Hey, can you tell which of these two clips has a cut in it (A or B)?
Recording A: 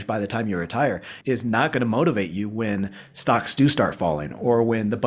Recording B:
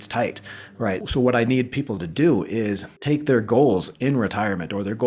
B